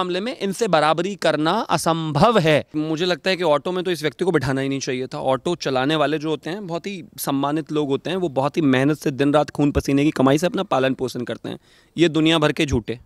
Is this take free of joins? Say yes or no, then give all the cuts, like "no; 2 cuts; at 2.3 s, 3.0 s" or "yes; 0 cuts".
no; 1 cut; at 2.7 s